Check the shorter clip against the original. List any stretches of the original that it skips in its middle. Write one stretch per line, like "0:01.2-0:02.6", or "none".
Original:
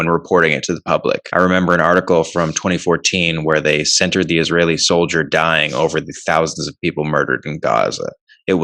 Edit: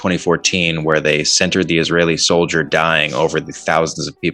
none